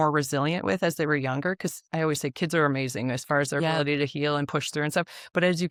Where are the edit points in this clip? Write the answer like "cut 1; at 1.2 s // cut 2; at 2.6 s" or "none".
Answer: none